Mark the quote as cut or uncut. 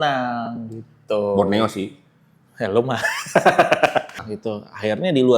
cut